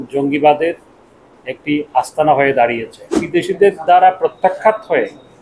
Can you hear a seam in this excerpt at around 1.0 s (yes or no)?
no